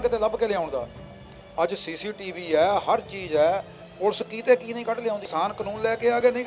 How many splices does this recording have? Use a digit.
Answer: 1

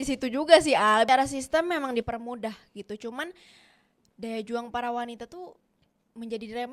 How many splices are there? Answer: 1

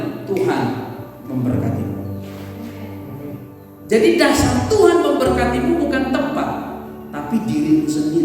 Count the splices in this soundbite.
1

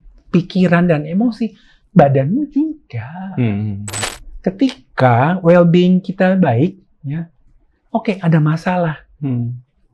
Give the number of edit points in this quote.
1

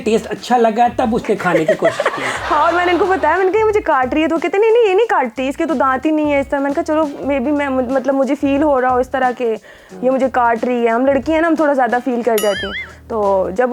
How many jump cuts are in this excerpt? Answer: 0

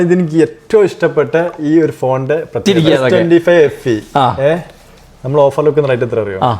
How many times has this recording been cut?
1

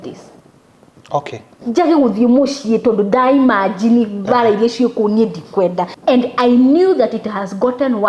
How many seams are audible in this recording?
1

